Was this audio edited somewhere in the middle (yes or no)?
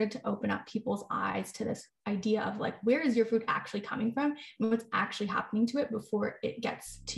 no